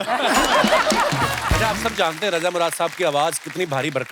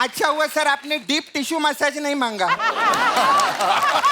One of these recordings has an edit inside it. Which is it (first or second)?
first